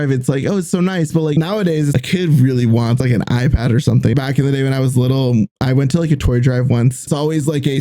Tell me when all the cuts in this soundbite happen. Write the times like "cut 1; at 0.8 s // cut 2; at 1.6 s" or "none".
cut 1; at 1.4 s // cut 2; at 3.0 s // cut 3; at 4.1 s // cut 4; at 7.1 s